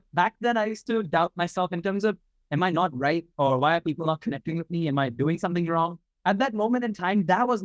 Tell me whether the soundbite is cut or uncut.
cut